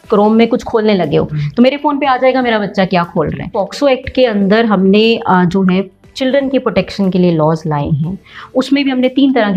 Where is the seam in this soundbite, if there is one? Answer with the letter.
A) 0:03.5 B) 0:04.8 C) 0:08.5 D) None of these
A